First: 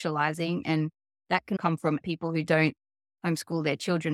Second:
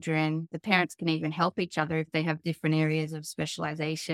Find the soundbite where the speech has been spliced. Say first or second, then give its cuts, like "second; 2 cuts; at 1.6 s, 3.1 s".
first; 1 cut; at 1.8 s